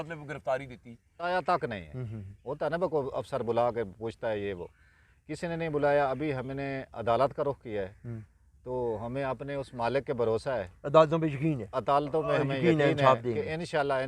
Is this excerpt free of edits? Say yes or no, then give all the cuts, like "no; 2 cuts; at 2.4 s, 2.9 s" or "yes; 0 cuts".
no; 1 cut; at 1.2 s